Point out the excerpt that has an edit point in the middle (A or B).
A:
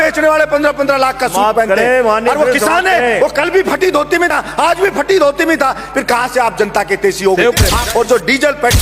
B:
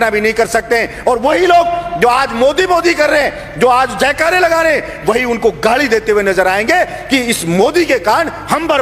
A